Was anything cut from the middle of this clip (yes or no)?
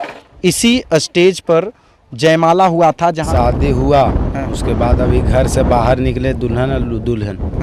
yes